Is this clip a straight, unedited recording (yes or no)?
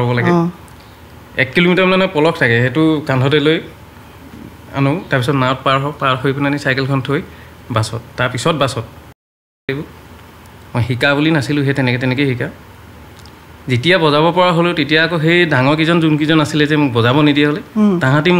no